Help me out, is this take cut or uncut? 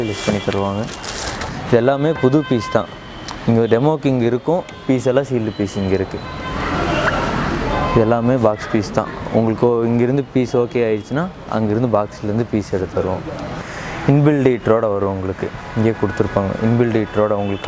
cut